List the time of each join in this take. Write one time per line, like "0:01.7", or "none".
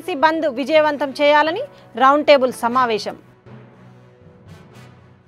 none